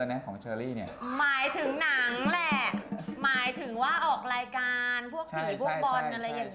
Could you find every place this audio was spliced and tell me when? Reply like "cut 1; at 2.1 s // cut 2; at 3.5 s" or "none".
none

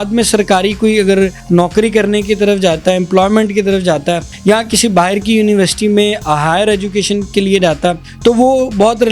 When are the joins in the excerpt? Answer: cut 1; at 1.4 s // cut 2; at 4.3 s // cut 3; at 8.1 s

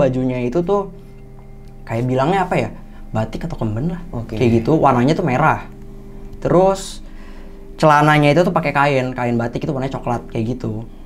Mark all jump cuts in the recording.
none

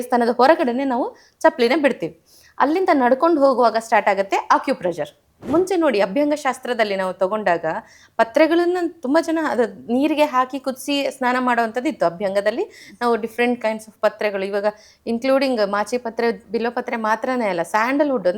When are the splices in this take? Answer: cut 1; at 5.4 s

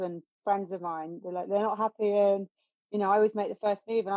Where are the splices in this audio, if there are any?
none

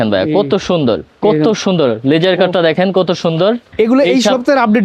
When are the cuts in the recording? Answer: cut 1; at 1.1 s // cut 2; at 3.7 s

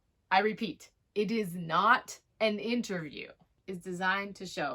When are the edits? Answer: cut 1; at 3.6 s

